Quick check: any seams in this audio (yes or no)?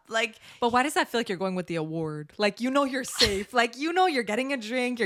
no